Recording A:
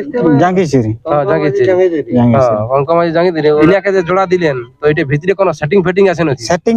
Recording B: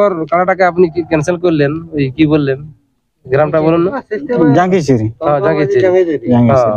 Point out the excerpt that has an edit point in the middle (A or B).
A